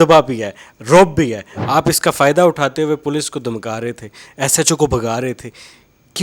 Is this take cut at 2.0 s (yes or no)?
no